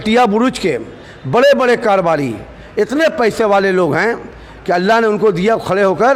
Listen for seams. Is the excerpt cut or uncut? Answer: uncut